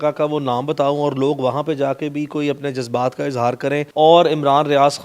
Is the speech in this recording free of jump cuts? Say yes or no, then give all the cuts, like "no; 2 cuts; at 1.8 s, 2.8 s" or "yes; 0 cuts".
no; 1 cut; at 3.9 s